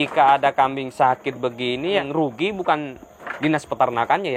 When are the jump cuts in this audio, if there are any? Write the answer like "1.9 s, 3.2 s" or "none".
2.0 s